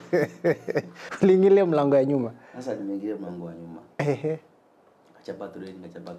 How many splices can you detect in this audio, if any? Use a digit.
1